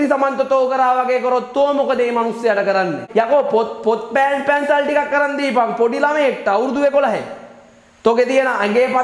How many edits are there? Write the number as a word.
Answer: one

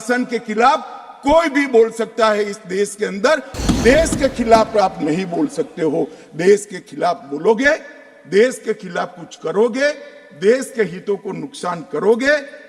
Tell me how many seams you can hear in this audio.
one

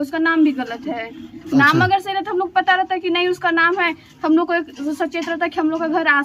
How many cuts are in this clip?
zero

